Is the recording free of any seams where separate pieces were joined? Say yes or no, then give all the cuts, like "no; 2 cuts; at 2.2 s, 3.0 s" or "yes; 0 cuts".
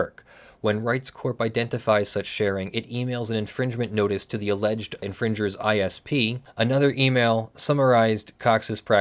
no; 1 cut; at 6.4 s